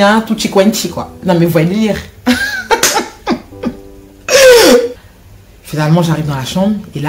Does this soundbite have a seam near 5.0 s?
yes; 1 cut; at 5.0 s

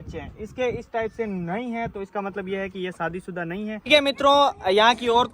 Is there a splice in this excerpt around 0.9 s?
no; 1 cut; at 3.8 s

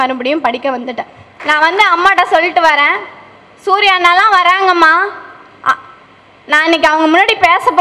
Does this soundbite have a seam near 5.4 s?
no; 1 cut; at 1.2 s

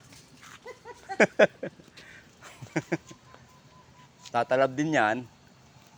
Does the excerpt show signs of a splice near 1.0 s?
no; 0 cuts

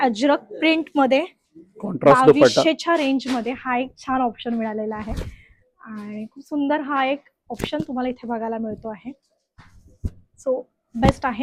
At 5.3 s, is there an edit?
no; 0 cuts

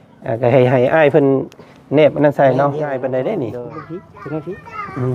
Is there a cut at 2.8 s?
yes; 1 cut; at 2.8 s

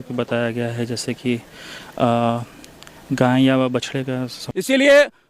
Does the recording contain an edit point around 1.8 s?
no; 1 cut; at 4.4 s

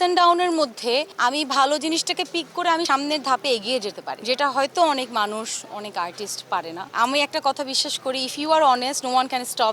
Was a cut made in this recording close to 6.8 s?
yes; 4 cuts; at 1.1 s, 2.9 s, 4.1 s, 6.8 s

